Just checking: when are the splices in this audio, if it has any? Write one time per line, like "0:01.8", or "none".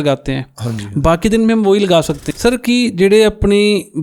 0:02.2